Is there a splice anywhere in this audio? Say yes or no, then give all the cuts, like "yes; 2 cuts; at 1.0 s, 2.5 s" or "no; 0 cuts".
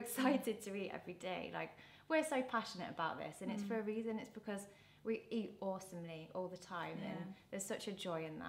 no; 0 cuts